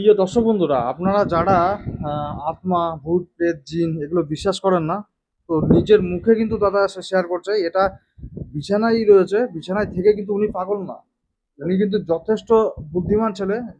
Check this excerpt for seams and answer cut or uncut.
uncut